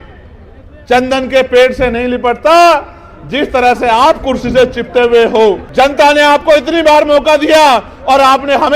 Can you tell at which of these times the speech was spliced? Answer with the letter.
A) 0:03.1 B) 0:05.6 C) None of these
B